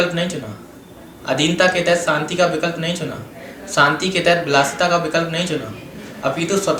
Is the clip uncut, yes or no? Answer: yes